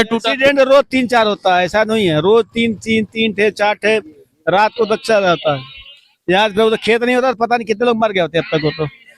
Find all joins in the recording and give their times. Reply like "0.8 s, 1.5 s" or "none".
none